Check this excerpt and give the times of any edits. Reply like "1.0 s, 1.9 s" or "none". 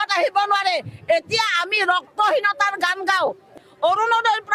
3.6 s